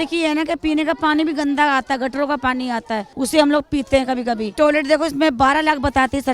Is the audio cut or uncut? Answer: cut